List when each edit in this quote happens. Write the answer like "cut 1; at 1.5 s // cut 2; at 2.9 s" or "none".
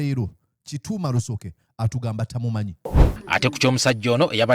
cut 1; at 3.0 s